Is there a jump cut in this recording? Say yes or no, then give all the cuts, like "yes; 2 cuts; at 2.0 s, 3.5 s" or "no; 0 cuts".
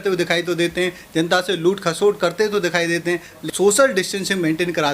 yes; 1 cut; at 3.4 s